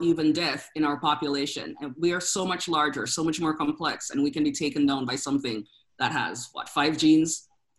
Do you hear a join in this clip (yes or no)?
no